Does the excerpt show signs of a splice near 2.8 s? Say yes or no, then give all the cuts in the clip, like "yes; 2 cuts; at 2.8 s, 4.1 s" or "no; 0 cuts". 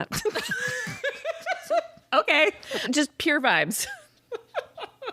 yes; 1 cut; at 2.8 s